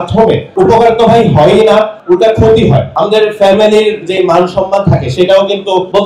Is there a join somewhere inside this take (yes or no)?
no